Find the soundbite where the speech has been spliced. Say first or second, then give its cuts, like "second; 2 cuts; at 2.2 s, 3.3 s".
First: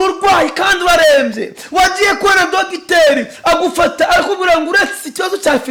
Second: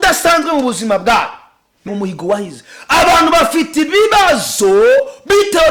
second; 1 cut; at 1.9 s